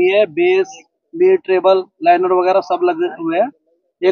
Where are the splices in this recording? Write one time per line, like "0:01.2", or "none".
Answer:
none